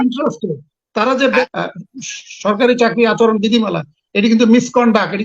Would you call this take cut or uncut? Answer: cut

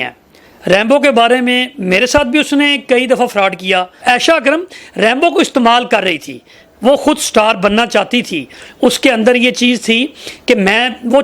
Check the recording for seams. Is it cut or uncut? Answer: cut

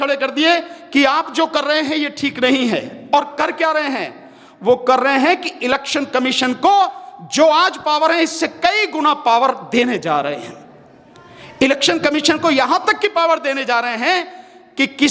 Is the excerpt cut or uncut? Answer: uncut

